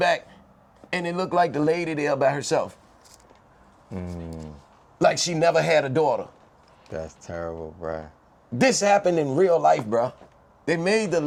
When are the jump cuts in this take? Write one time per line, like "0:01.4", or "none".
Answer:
none